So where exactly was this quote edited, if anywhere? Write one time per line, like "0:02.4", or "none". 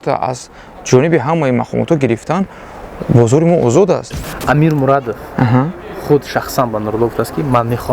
0:04.1